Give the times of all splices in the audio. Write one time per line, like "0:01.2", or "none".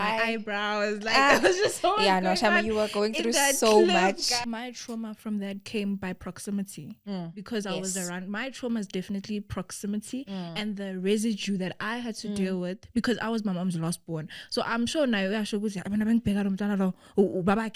0:04.2